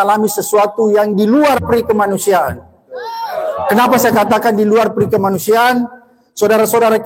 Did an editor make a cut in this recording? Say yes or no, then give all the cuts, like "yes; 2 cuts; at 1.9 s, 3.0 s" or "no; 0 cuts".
no; 0 cuts